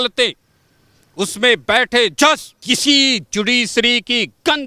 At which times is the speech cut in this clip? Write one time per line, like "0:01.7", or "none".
0:02.6